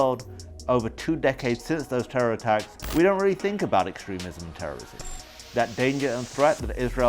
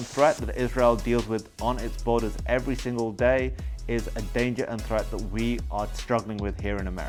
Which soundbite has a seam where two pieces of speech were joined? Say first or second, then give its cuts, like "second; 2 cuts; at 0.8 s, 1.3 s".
first; 2 cuts; at 2.8 s, 5.0 s